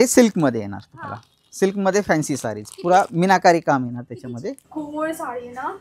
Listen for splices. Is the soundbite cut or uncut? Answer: cut